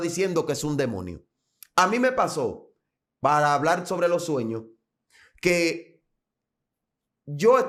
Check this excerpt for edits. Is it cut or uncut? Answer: uncut